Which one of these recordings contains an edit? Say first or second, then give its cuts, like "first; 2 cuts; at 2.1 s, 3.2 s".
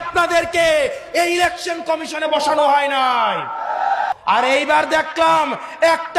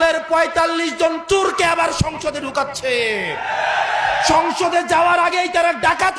first; 1 cut; at 4.1 s